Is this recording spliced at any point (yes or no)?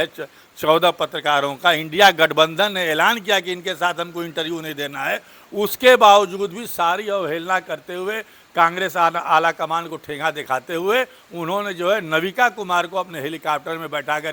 no